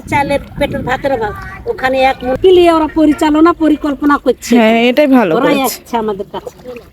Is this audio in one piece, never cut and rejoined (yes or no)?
no